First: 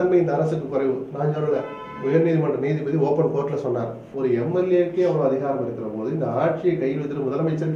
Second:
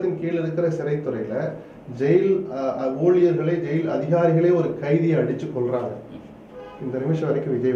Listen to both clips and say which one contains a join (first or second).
first